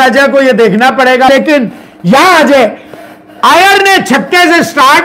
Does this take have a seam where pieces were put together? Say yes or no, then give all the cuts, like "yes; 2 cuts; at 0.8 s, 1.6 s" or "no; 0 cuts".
yes; 1 cut; at 1.3 s